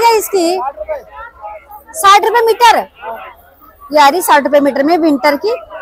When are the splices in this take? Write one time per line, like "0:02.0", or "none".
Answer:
none

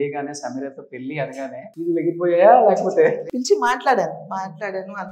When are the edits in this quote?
0:01.7
0:03.2

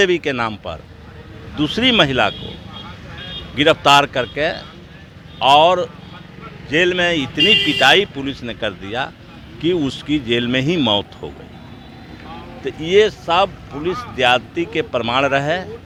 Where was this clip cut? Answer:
none

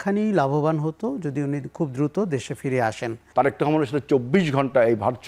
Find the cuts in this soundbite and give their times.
0:03.2

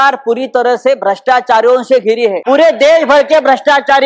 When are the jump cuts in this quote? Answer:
0:02.4

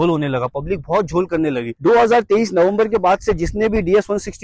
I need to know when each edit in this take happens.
0:01.8

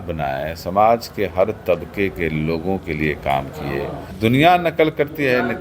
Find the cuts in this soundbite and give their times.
0:04.0

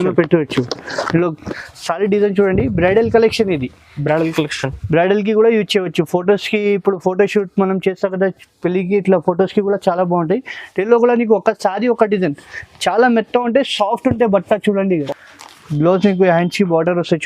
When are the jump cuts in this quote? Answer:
0:01.5
0:14.9

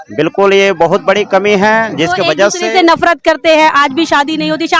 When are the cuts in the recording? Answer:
none

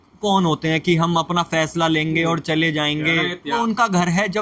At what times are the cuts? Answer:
0:03.5

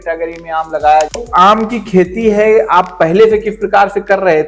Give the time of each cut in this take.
0:01.1

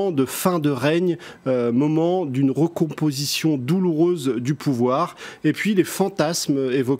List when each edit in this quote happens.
none

